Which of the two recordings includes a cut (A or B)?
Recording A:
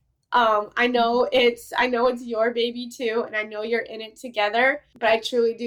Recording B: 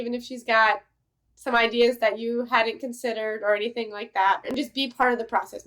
B